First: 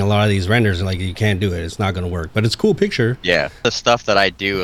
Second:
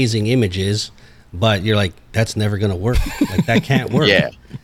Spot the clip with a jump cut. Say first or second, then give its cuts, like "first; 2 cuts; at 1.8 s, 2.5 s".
first; 1 cut; at 3.6 s